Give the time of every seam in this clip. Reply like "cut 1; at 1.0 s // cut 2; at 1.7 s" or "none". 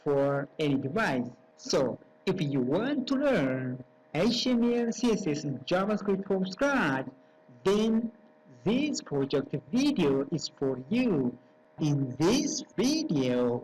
cut 1; at 12.6 s